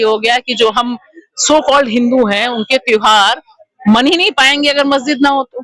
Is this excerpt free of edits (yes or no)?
yes